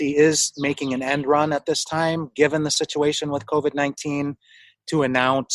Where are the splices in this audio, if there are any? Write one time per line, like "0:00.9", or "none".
none